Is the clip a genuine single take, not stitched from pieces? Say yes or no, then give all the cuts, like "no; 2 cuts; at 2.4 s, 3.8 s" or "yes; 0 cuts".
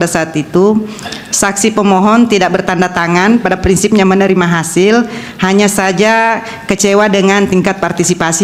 yes; 0 cuts